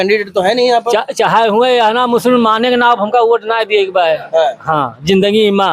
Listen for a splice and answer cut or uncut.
uncut